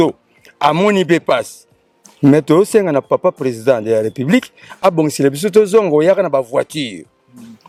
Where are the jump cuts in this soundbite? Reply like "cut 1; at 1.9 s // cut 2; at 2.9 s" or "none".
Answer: none